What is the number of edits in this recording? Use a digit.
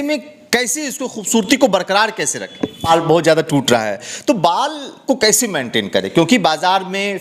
1